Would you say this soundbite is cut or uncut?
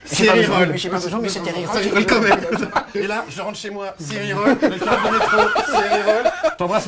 uncut